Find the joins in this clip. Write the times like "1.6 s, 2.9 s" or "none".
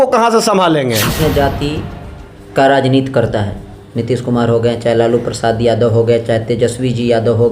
1.2 s